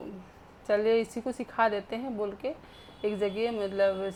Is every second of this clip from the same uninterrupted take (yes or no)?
yes